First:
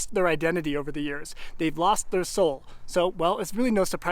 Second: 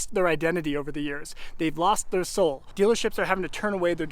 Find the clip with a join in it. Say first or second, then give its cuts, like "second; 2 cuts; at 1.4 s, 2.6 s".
second; 1 cut; at 2.6 s